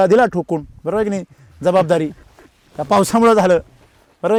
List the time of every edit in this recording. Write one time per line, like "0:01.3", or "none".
none